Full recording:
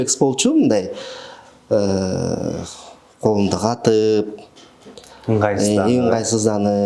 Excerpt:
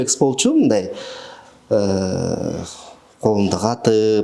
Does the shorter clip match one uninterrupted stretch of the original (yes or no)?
yes